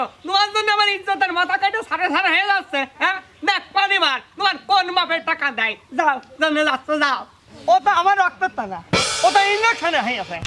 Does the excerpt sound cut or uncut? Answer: cut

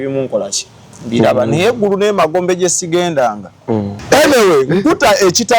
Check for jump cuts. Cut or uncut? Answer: cut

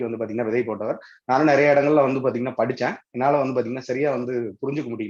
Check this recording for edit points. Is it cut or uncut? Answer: uncut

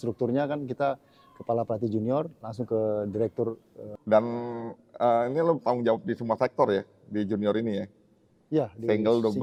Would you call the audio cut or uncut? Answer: uncut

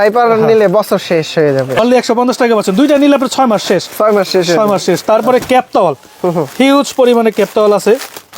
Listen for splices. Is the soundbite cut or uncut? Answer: uncut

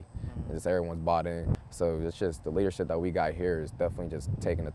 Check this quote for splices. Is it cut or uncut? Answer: cut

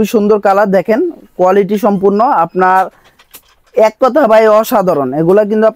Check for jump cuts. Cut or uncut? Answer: uncut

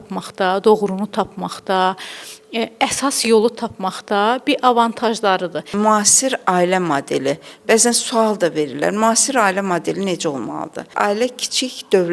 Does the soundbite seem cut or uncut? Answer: cut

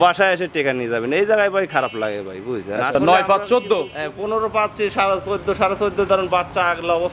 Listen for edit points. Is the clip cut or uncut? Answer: cut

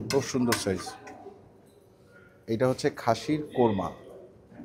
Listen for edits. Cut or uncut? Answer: uncut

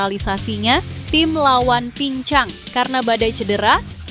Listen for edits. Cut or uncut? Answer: cut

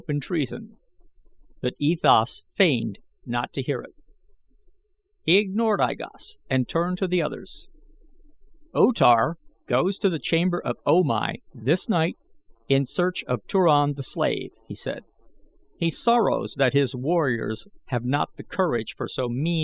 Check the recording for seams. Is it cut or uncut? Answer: uncut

